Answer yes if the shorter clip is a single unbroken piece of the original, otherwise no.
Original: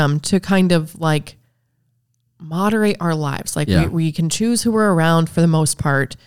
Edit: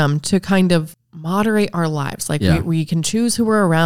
no